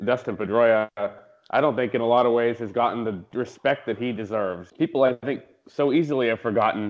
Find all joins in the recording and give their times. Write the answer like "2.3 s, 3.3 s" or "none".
4.6 s